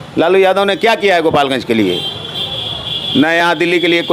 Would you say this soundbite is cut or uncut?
uncut